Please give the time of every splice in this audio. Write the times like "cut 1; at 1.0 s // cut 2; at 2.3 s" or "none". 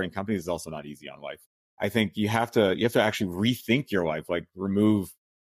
cut 1; at 1.3 s